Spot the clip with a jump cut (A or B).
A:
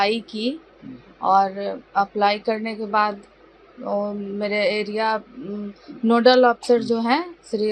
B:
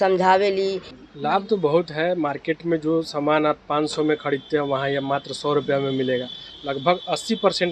B